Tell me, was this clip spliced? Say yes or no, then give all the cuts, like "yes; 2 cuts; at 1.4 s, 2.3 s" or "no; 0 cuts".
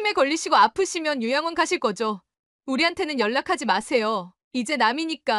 no; 0 cuts